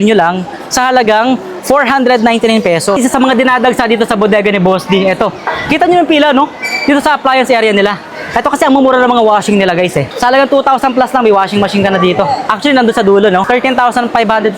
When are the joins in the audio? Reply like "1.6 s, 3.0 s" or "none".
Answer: 3.0 s, 10.1 s, 13.5 s